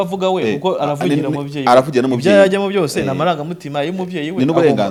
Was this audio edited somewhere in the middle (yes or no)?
no